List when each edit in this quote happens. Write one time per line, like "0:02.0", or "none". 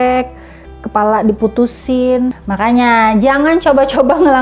0:02.4